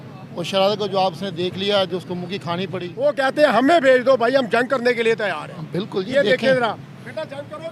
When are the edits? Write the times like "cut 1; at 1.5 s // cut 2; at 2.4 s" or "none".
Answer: cut 1; at 2.9 s

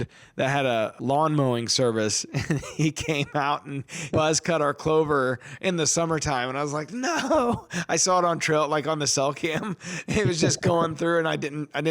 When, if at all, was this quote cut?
cut 1; at 1.0 s // cut 2; at 4.1 s

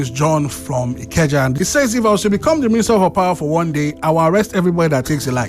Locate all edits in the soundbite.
cut 1; at 1.5 s

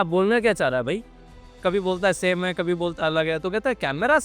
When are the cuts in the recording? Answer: none

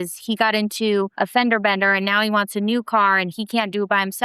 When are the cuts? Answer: cut 1; at 1.1 s

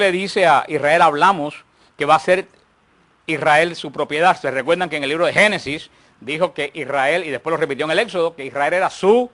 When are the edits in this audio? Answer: cut 1; at 5.2 s

